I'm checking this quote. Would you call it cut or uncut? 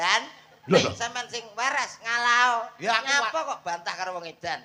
uncut